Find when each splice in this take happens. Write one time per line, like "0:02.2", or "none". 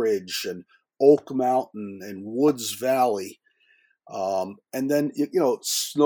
none